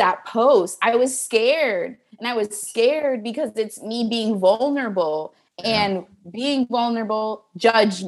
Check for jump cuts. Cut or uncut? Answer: uncut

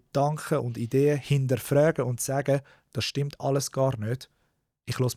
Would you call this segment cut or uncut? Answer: uncut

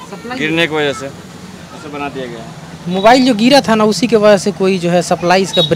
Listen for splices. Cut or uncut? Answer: uncut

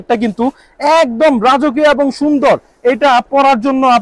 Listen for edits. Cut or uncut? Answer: uncut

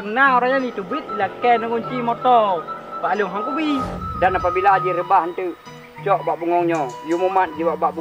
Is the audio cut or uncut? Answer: cut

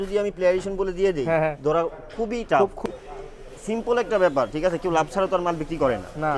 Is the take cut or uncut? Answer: cut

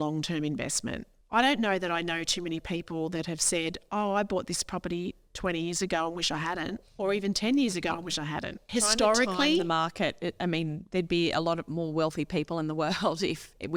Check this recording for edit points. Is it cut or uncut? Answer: cut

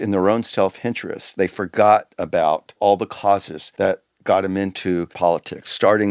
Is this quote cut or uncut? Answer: cut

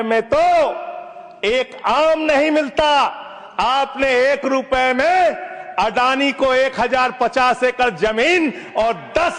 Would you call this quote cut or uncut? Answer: uncut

